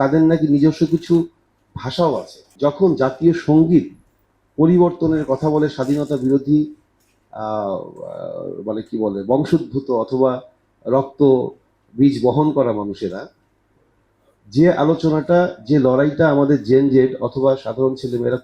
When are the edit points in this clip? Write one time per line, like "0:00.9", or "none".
0:02.4

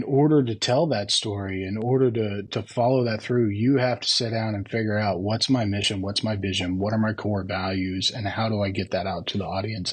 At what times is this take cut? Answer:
none

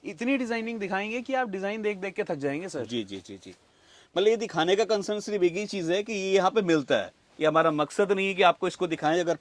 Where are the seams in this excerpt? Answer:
none

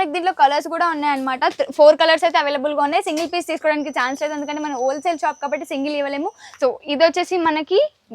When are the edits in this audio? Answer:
0:06.6

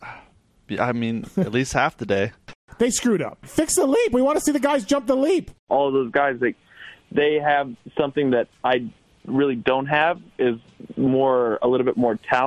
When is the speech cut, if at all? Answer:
0:02.6
0:03.4
0:05.6

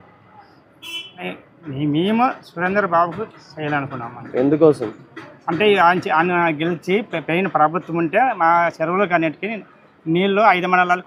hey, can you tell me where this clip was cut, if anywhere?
none

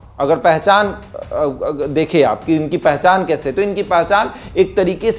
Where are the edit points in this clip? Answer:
none

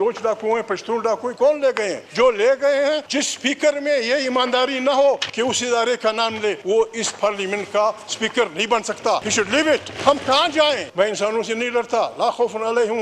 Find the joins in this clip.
0:02.0
0:03.1
0:05.3
0:06.6
0:09.3
0:09.9
0:10.9

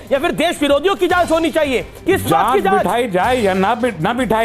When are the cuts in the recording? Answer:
0:01.9

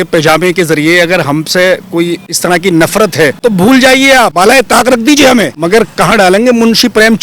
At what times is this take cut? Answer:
0:02.3
0:03.4
0:04.3
0:05.6

